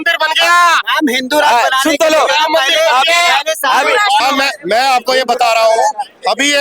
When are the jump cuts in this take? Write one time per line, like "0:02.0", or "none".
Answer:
0:04.2